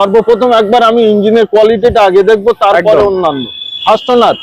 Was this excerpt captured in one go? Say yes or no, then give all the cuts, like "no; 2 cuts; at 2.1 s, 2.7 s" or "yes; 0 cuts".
yes; 0 cuts